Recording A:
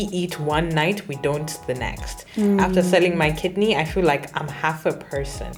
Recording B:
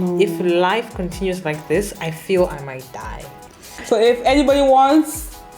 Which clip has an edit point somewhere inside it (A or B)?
B